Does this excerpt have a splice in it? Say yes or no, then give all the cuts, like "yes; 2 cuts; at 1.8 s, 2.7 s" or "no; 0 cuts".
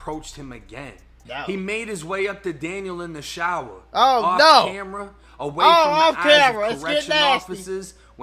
yes; 1 cut; at 1.2 s